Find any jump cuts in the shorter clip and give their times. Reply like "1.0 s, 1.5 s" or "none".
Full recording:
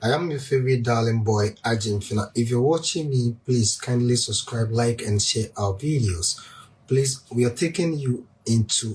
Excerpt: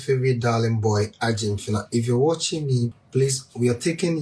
2.9 s